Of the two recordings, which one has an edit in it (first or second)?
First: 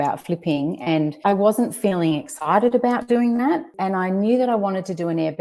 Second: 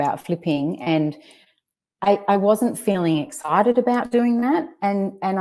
first